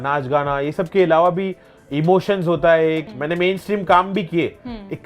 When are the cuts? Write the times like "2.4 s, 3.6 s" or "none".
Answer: 3.1 s